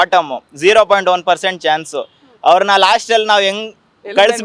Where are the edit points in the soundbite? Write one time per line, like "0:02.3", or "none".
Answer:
none